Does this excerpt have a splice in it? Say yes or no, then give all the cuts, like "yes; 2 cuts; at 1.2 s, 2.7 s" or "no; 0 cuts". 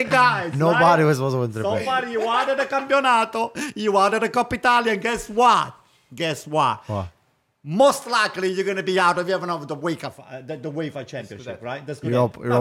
no; 0 cuts